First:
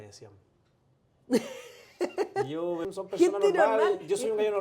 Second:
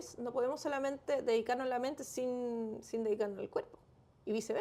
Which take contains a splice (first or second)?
first